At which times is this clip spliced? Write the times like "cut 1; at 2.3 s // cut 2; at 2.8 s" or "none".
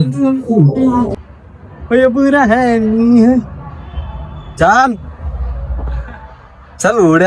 cut 1; at 1.2 s